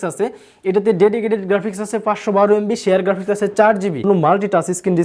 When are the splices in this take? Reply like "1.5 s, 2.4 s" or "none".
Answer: 4.1 s